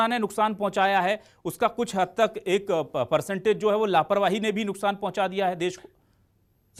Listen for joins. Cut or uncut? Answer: uncut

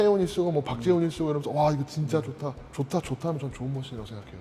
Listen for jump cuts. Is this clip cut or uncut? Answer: uncut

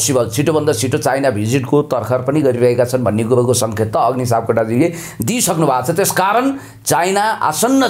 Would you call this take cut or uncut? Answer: uncut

